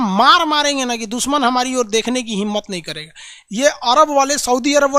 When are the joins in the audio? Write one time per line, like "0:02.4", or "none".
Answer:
none